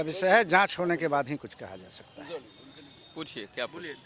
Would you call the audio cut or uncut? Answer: uncut